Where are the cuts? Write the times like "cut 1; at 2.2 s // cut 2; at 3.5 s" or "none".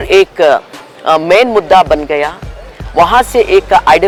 none